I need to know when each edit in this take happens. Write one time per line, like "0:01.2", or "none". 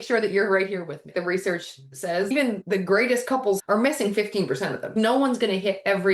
0:01.1
0:02.6
0:03.6
0:04.8